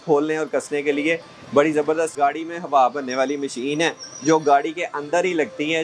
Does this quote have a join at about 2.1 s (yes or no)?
yes